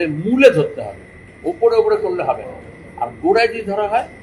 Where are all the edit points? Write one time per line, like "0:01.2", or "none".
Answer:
none

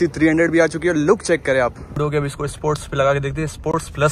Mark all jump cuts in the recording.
0:02.0

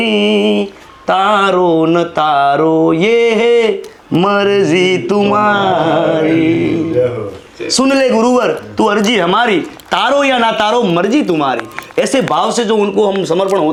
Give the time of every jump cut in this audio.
none

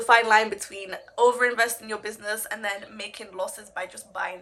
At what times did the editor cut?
none

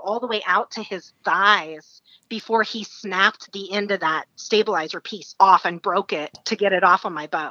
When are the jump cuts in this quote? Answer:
0:06.3

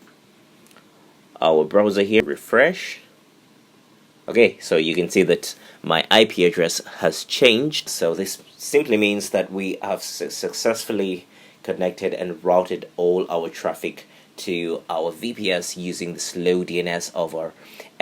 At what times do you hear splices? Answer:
0:02.2
0:07.9

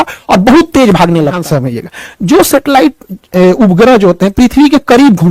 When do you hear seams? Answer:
0:01.4

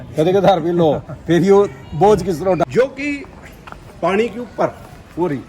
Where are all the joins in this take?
0:02.6

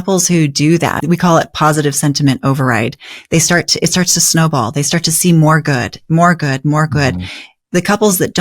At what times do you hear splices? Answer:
0:01.0

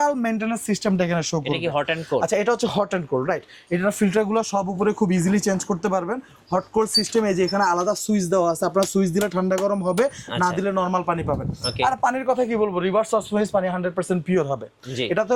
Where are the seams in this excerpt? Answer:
none

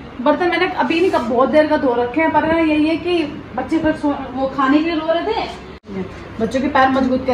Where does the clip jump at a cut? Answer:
0:05.9

